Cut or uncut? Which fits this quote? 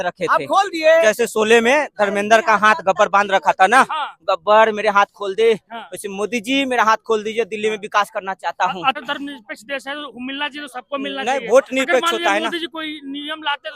cut